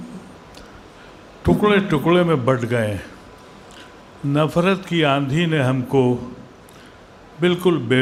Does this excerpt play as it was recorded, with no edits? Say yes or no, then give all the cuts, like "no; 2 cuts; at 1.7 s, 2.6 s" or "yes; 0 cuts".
yes; 0 cuts